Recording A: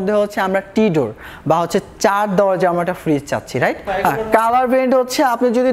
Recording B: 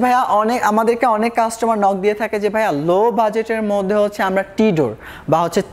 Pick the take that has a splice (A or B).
A